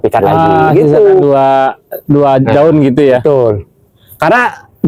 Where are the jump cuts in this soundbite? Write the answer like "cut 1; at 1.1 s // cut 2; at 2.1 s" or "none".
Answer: none